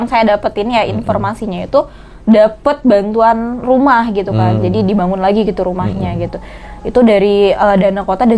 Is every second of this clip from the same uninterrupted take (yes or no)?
yes